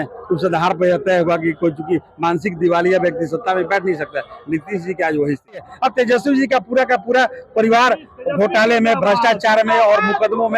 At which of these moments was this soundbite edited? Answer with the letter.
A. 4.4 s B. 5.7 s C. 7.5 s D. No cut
B